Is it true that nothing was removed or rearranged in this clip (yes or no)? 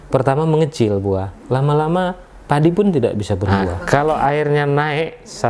no